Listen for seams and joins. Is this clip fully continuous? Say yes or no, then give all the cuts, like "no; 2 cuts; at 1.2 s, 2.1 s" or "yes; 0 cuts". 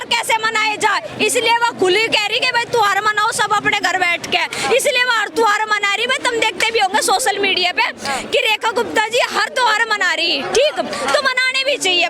yes; 0 cuts